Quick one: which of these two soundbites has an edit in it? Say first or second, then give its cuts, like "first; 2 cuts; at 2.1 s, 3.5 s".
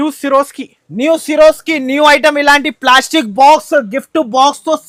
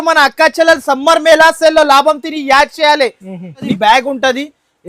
second; 1 cut; at 3.6 s